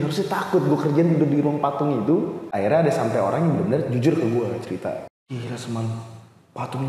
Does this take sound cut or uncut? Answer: cut